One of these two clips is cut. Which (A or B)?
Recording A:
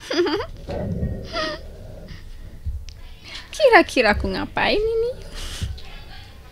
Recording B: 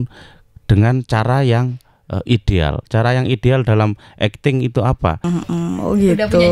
B